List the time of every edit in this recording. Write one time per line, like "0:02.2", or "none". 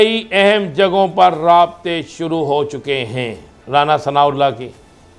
0:03.5